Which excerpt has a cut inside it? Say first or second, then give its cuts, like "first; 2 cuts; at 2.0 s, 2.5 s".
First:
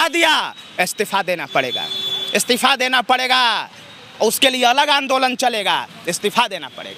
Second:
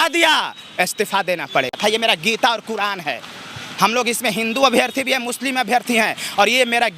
second; 1 cut; at 1.8 s